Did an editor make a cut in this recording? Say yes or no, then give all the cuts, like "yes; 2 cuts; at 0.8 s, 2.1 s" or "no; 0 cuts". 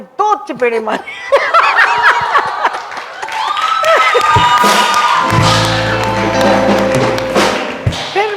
no; 0 cuts